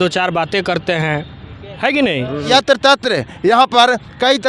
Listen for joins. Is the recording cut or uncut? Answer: cut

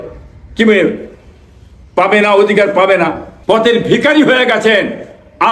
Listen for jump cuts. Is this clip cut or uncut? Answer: cut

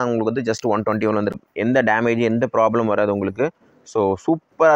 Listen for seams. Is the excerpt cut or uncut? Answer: cut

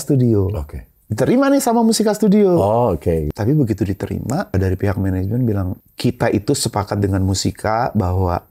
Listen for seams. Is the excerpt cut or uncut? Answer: cut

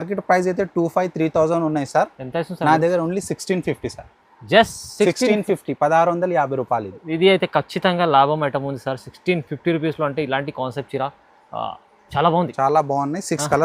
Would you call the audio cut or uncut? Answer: uncut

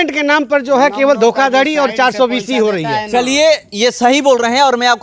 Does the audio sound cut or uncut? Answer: uncut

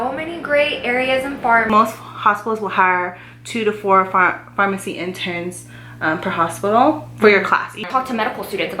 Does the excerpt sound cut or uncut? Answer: cut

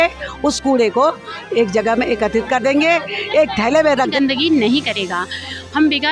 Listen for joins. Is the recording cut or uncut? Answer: cut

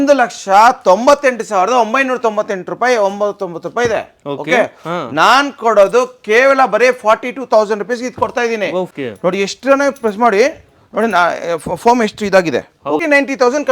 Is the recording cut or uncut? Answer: cut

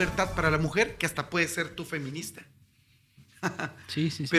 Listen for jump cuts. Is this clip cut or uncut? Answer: uncut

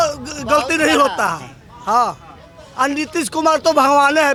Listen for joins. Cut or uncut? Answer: uncut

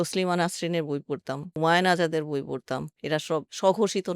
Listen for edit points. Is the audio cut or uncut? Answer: cut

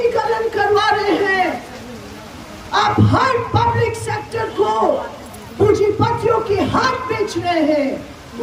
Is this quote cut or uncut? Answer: uncut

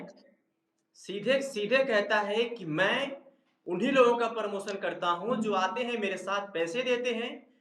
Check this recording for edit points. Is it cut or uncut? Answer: uncut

